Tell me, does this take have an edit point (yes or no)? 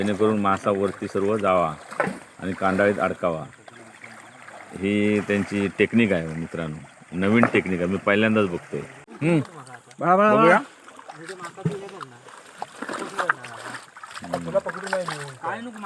no